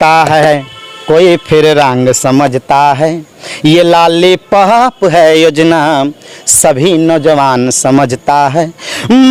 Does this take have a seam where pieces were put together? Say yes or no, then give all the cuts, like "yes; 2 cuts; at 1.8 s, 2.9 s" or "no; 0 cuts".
no; 0 cuts